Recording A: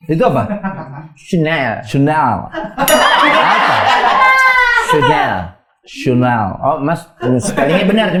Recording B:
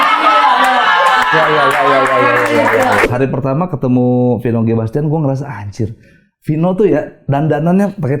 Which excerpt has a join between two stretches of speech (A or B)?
B